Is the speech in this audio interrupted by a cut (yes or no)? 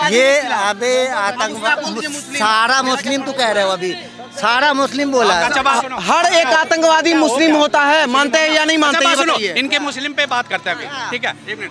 no